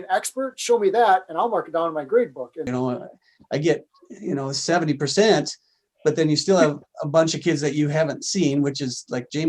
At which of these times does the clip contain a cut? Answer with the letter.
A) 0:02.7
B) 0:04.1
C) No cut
A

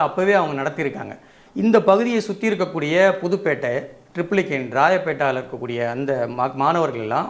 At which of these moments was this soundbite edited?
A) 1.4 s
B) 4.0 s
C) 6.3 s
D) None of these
A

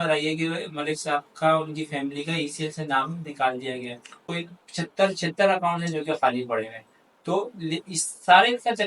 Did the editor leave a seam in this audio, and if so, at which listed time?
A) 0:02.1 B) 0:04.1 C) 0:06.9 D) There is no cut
B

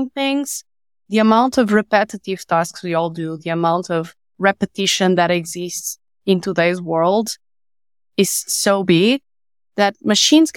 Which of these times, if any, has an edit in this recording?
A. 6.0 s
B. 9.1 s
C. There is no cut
C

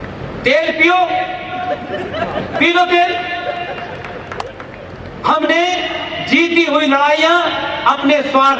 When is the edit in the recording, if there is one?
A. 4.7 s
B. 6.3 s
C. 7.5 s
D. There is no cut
A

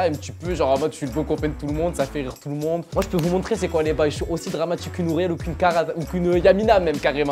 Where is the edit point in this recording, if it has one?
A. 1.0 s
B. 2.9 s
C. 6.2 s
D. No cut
B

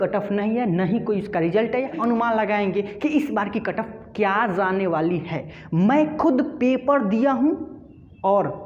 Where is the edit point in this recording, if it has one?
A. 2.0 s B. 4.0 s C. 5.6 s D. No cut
A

